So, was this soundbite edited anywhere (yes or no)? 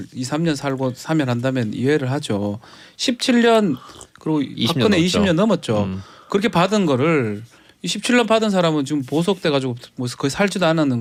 no